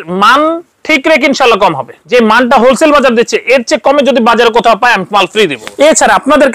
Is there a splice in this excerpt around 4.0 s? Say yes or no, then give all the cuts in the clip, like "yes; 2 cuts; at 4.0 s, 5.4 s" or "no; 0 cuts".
no; 2 cuts; at 1.9 s, 5.6 s